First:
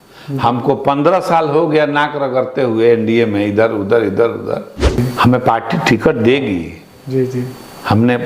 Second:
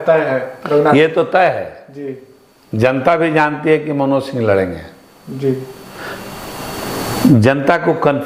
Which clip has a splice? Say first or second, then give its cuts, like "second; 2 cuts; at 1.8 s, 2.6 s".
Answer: first; 1 cut; at 5.0 s